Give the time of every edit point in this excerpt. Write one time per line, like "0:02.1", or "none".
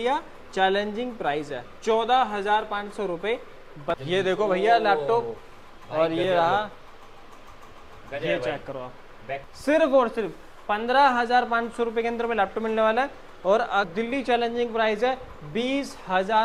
0:04.0
0:09.4
0:13.8